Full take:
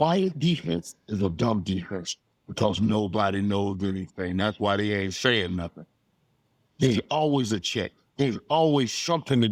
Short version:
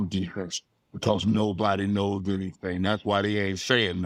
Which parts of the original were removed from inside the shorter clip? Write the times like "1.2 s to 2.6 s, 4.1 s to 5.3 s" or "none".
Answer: none